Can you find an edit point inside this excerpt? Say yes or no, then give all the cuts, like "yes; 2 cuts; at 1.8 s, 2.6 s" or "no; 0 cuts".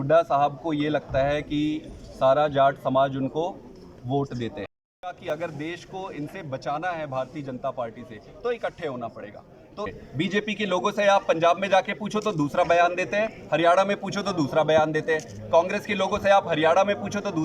yes; 2 cuts; at 5.3 s, 10.0 s